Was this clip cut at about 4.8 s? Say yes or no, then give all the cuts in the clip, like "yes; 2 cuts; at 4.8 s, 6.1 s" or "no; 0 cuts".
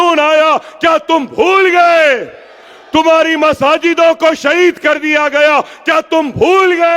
no; 0 cuts